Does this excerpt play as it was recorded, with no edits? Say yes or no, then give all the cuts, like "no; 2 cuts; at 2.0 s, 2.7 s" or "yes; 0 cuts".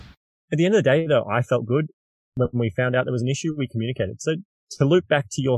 no; 1 cut; at 4.6 s